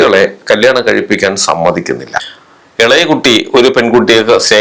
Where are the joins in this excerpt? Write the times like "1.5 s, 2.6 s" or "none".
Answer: 2.4 s